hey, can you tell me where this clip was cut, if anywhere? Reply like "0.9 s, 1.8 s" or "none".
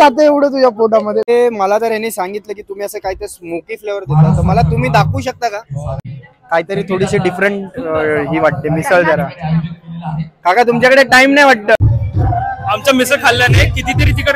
1.3 s, 5.9 s, 11.8 s